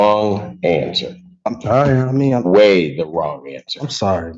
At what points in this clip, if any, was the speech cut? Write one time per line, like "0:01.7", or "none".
none